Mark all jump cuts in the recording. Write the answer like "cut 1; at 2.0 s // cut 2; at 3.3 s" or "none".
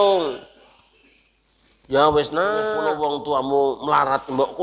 cut 1; at 2.8 s